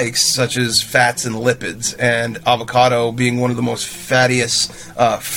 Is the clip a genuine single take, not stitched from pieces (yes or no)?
yes